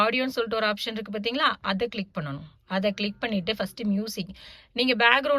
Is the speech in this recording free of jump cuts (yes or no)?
yes